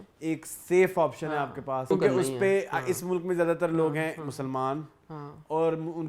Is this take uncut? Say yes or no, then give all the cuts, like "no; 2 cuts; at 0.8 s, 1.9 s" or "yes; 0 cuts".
no; 1 cut; at 1.9 s